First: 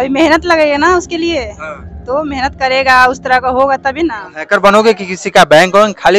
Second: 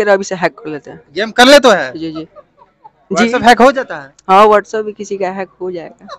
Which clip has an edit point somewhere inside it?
first; 1 cut; at 4.3 s

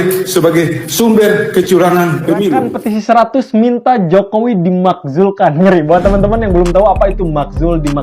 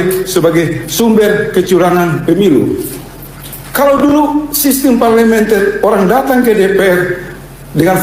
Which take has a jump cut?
first; 1 cut; at 2.7 s

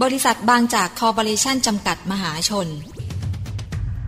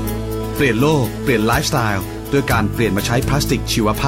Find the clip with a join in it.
first; 1 cut; at 3.0 s

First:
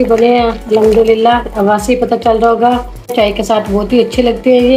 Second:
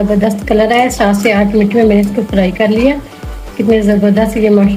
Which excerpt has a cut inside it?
first; 1 cut; at 3.1 s

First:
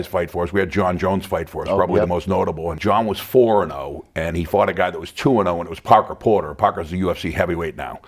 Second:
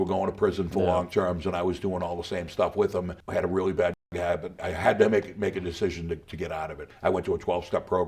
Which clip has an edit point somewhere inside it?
second; 2 cuts; at 4.6 s, 6.8 s

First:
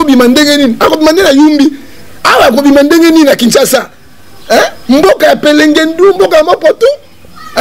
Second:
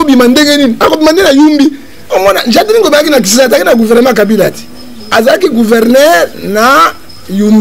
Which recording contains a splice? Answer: second; 1 cut; at 2.1 s

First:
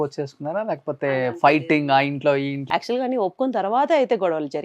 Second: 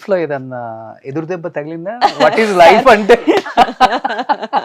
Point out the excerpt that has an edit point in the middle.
first; 1 cut; at 2.6 s

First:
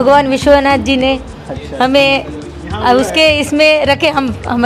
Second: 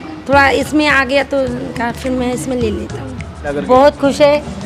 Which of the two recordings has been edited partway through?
second; 1 cut; at 3.6 s

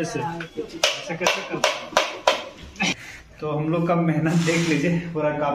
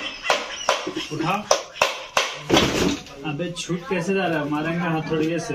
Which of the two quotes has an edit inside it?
first; 1 cut; at 2.9 s

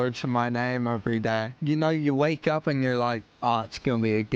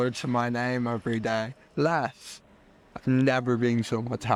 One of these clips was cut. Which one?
first; 2 cuts; at 1.6 s, 3.3 s

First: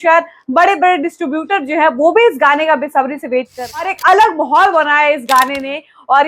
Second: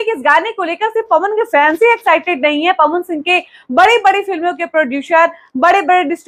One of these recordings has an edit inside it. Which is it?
first; 1 cut; at 3.8 s

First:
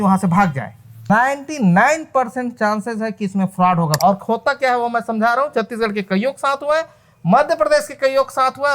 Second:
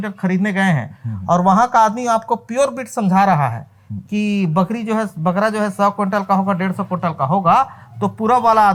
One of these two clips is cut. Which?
first; 2 cuts; at 1.1 s, 4.0 s

